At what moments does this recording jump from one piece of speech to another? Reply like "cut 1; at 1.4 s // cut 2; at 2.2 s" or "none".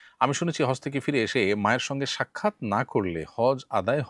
none